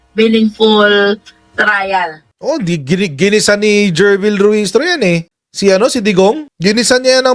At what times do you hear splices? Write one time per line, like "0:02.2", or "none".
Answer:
0:02.3